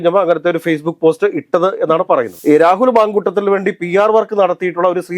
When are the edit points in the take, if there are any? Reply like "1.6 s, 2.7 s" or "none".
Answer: 2.3 s

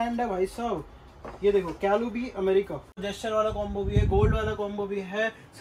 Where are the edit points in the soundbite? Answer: 2.9 s

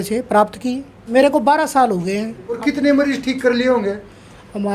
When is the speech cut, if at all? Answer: 0.9 s, 2.6 s

